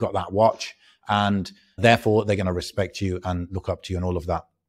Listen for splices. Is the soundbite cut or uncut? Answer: cut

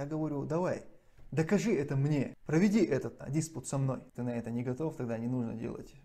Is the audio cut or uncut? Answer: cut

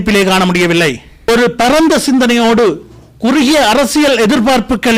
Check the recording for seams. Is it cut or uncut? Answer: cut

